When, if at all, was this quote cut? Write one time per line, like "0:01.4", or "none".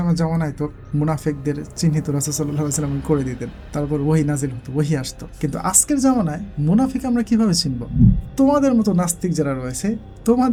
none